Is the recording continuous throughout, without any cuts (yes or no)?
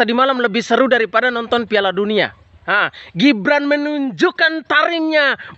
yes